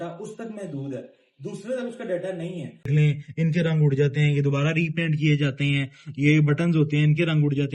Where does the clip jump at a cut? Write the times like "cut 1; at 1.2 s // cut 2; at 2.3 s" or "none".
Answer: cut 1; at 2.9 s